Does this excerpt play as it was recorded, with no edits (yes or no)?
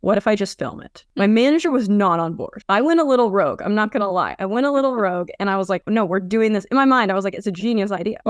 yes